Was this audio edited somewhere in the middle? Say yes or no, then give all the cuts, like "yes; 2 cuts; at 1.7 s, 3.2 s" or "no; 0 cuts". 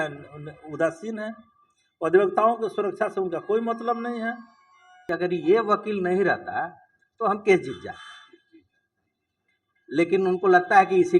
yes; 1 cut; at 5.1 s